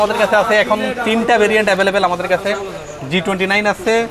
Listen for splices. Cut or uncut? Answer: uncut